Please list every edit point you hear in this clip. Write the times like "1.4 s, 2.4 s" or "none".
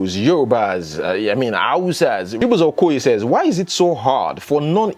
2.3 s